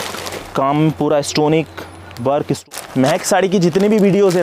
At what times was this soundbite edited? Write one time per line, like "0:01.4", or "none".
0:02.6